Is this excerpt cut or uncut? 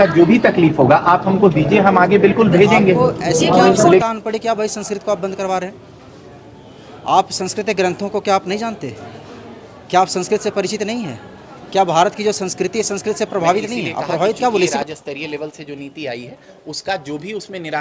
cut